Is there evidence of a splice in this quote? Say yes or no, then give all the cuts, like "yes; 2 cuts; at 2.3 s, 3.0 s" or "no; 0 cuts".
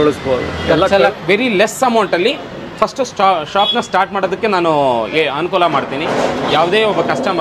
yes; 1 cut; at 1.0 s